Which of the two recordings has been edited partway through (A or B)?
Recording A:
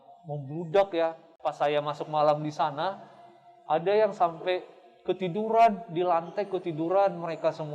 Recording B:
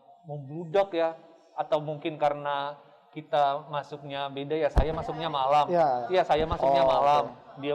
A